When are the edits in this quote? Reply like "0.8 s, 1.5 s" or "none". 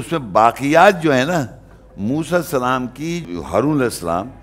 3.3 s